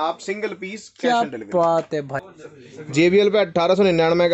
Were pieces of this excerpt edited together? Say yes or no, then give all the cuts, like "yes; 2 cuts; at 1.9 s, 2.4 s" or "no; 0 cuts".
yes; 1 cut; at 2.2 s